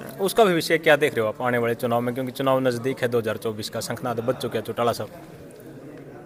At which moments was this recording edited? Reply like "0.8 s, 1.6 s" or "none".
none

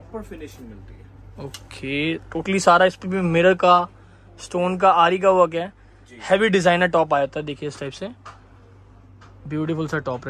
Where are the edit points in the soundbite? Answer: none

